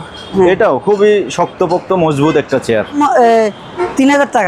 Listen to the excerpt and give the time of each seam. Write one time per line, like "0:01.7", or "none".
0:03.0